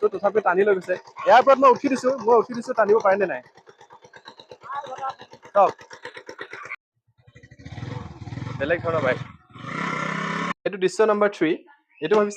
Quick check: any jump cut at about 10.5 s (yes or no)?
yes